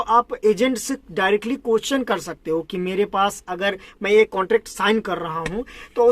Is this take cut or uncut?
uncut